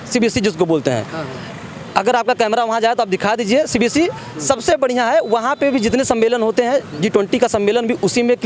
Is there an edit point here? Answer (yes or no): no